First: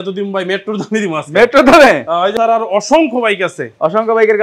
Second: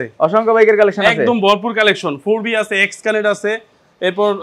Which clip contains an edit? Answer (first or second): first